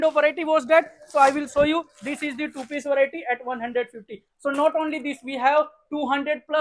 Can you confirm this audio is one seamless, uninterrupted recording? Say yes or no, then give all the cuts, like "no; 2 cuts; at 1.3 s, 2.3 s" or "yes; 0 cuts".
yes; 0 cuts